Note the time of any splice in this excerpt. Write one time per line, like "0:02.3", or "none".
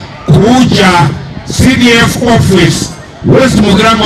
none